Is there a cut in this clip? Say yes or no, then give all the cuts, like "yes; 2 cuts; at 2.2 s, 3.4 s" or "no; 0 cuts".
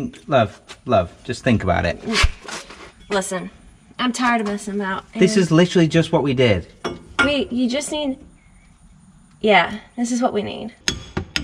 no; 0 cuts